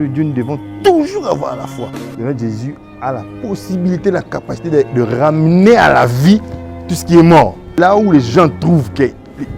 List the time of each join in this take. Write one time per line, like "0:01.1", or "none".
0:02.0
0:07.7